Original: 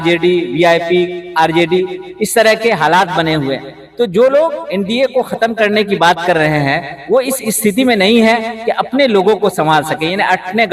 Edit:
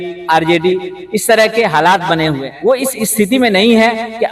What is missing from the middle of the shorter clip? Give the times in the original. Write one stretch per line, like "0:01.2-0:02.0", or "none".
0:03.5-0:06.9